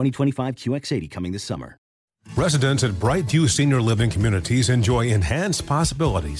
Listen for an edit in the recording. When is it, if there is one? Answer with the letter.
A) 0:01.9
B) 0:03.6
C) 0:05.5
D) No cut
A